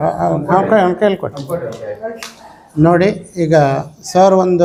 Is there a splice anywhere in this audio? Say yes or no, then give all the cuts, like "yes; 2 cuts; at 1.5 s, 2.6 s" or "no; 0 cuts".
no; 0 cuts